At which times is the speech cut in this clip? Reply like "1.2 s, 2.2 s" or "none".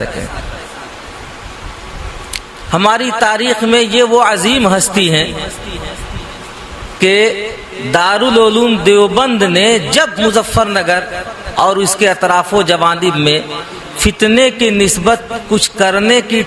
none